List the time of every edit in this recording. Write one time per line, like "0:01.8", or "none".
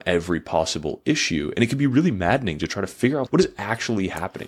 0:03.3